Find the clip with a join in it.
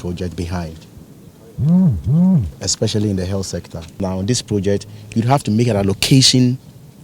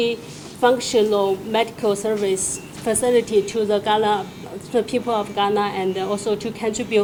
first; 1 cut; at 3.9 s

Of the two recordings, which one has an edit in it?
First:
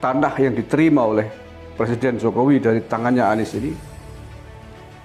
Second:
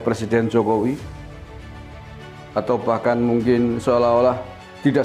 second; 2 cuts; at 1.0 s, 2.5 s

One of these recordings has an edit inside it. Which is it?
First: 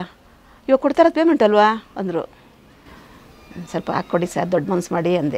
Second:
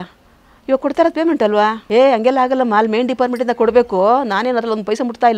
second; 1 cut; at 1.8 s

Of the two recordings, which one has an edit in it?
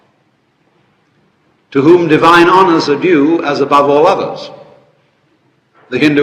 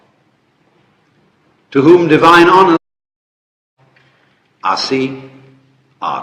first; 1 cut; at 2.8 s

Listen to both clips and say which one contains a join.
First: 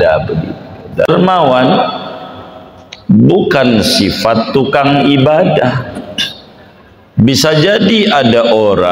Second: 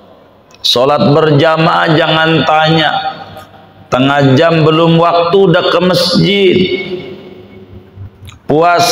first; 1 cut; at 1.1 s

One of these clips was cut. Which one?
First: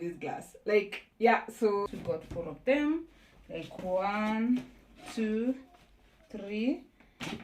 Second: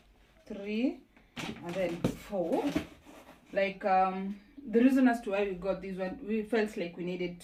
first; 1 cut; at 1.9 s

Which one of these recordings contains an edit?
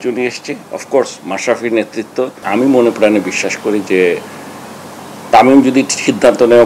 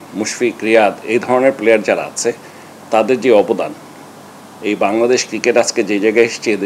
first; 1 cut; at 2.4 s

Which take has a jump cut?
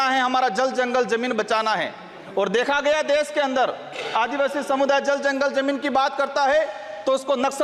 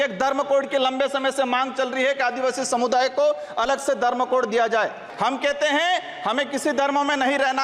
second; 1 cut; at 5.0 s

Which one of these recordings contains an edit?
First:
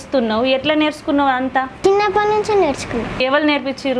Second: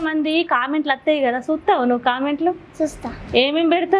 first; 2 cuts; at 1.7 s, 3.2 s

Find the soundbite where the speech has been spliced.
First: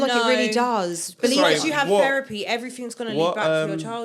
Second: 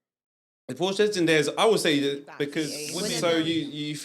second; 1 cut; at 2.8 s

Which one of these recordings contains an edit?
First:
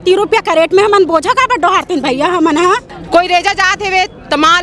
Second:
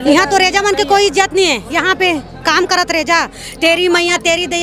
first; 1 cut; at 2.9 s

